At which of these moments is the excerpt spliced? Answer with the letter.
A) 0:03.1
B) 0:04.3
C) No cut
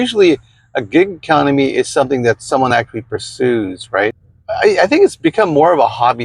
B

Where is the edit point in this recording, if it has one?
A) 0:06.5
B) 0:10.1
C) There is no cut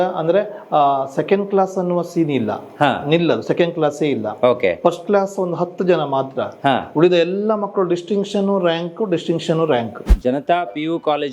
B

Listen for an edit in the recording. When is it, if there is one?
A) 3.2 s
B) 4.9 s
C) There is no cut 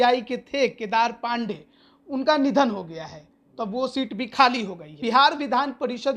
B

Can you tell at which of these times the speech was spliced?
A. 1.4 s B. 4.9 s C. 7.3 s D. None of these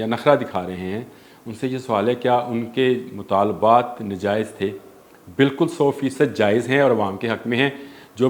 D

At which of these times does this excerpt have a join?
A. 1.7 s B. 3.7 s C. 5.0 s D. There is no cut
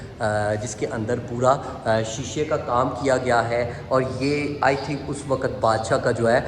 D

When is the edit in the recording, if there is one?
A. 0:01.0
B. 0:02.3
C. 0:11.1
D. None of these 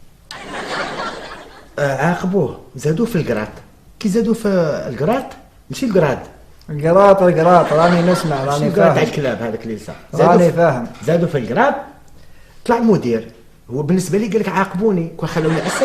A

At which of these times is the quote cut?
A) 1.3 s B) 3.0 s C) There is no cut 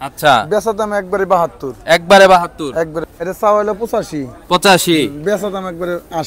B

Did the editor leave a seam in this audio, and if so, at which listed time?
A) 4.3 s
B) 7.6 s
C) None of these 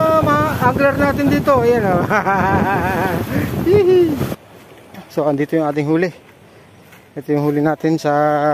A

